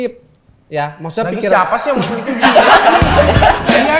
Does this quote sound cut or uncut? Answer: uncut